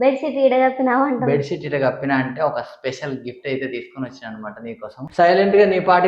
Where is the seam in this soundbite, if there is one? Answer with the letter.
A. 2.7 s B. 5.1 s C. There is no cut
B